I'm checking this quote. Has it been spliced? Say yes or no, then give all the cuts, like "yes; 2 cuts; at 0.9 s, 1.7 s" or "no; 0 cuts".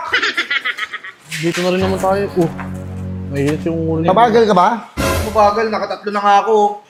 no; 0 cuts